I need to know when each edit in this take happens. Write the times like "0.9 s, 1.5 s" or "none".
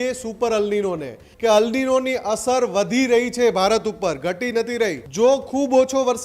1.2 s, 5.0 s